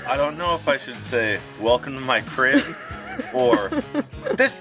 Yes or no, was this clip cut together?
no